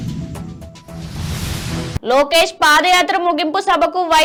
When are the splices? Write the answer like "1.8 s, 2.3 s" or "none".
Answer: none